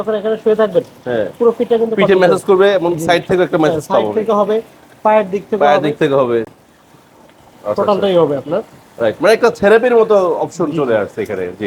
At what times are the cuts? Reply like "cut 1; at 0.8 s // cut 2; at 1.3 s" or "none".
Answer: none